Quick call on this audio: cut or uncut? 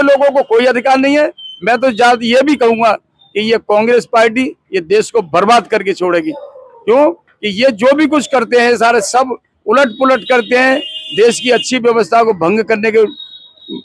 uncut